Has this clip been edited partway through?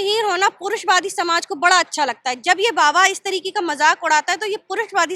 no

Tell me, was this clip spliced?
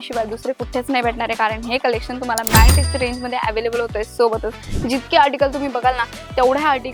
no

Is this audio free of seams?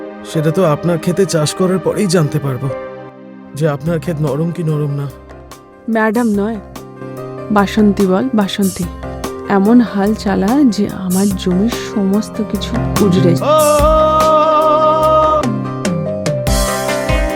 no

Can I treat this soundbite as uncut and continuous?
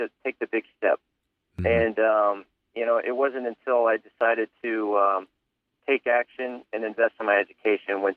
yes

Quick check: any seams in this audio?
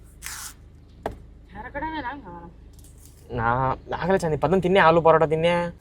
no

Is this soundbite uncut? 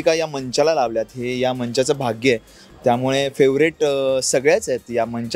yes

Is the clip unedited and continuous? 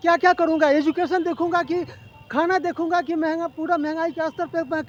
yes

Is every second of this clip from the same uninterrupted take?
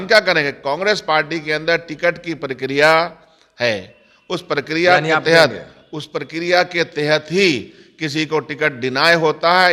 yes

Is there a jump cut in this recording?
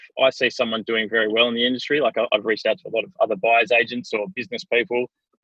no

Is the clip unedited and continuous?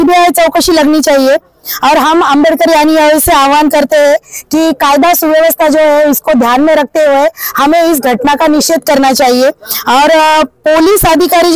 yes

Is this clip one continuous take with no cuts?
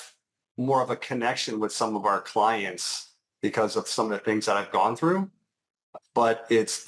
yes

